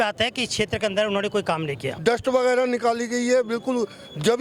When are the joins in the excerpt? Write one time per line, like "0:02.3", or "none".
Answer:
0:01.9